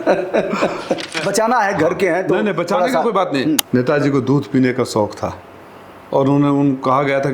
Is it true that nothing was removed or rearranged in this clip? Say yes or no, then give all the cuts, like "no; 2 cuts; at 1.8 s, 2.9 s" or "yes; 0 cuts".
no; 2 cuts; at 1.1 s, 3.6 s